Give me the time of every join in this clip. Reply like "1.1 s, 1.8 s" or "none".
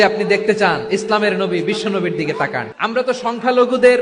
2.7 s